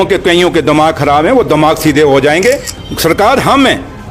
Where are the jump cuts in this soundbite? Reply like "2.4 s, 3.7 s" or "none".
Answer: 2.7 s